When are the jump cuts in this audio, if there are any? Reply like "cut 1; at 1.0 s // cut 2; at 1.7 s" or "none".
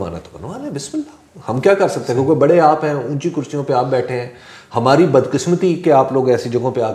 none